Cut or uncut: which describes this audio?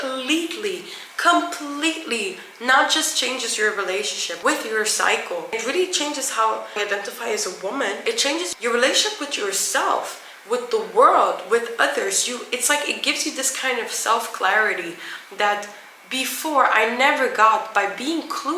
uncut